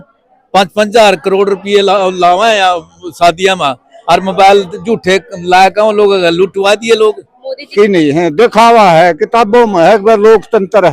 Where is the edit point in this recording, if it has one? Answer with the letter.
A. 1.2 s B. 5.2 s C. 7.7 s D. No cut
C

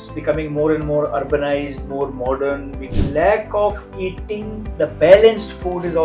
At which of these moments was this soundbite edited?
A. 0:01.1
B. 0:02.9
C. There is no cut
B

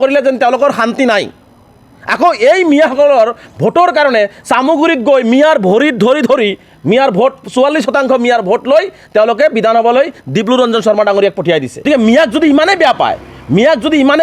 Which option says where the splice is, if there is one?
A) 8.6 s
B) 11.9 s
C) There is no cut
B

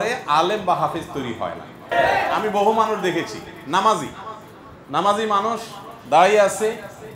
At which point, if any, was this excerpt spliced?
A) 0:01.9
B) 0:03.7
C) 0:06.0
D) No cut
A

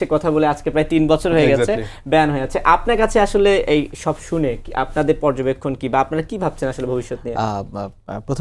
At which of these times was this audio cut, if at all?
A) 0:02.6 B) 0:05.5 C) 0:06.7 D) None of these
D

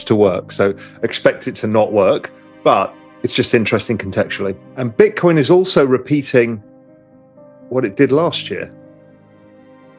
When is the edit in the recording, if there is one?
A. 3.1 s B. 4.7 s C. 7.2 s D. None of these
B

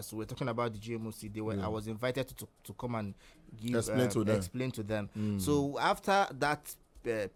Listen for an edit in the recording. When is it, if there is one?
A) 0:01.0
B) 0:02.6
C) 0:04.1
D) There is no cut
D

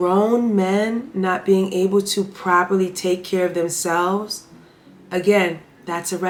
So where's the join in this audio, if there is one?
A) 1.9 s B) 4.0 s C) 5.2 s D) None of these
D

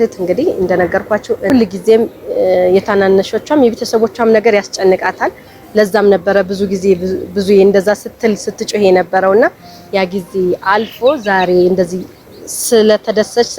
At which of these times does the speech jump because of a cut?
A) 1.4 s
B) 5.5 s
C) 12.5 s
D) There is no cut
A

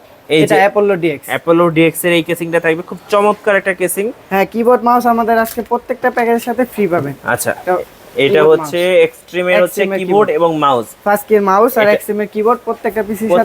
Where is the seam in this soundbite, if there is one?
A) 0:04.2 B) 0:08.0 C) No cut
A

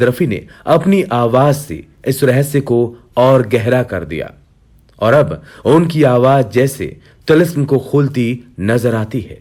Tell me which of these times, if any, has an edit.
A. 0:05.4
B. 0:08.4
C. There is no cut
C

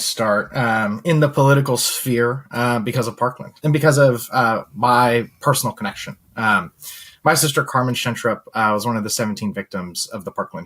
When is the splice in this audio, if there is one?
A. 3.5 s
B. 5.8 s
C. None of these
A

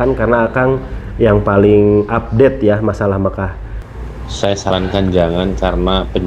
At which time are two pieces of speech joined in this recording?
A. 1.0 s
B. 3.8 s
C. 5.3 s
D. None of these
B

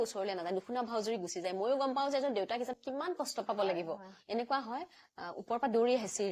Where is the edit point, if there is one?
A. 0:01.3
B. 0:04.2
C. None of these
B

